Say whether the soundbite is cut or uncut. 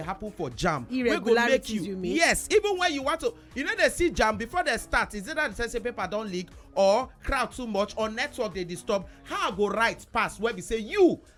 uncut